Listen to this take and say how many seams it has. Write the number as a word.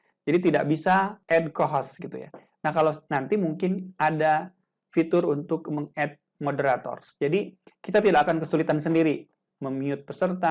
one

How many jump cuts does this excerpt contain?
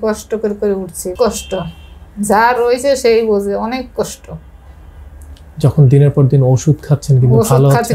one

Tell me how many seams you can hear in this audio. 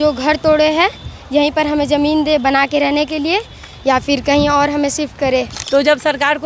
one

